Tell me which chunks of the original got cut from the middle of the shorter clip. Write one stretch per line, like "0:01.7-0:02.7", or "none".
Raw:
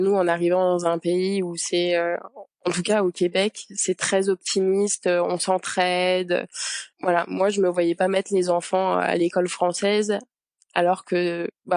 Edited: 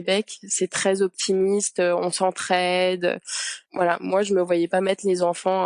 none